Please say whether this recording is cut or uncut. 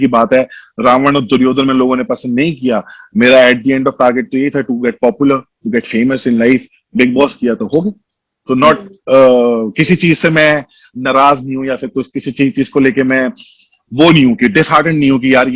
uncut